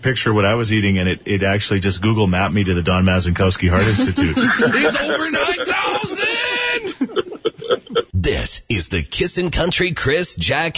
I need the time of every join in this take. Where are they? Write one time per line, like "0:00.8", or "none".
0:08.1